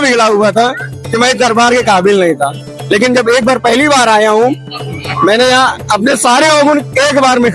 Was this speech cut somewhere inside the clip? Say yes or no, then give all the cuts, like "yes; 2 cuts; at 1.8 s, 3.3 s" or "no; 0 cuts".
no; 0 cuts